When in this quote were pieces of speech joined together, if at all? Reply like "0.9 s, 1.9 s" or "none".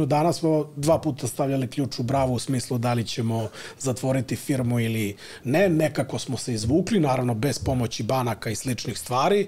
none